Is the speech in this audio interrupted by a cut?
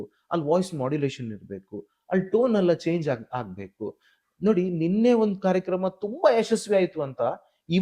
no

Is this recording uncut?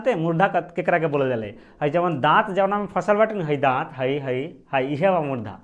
yes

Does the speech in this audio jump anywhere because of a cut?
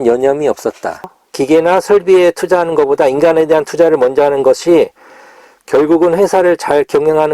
yes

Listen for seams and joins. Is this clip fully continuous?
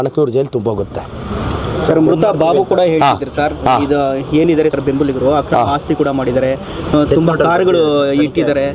yes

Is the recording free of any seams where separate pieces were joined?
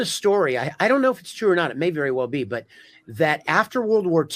yes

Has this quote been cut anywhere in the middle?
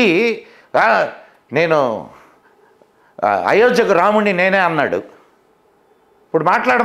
no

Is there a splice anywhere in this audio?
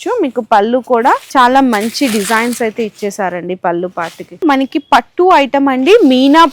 yes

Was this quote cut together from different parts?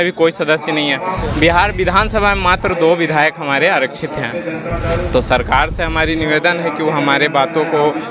no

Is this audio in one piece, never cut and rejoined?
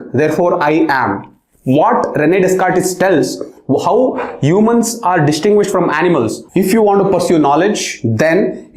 no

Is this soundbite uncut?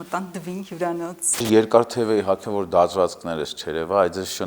no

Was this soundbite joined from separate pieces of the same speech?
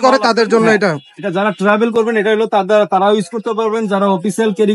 no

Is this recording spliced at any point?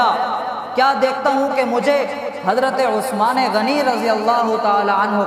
no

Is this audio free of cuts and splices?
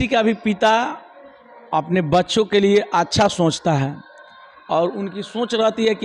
yes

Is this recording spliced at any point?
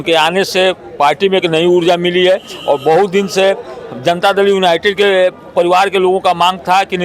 no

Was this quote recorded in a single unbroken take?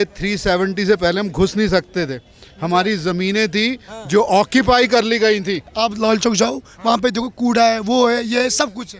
no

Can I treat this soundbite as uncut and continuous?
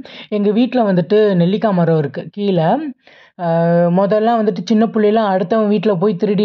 yes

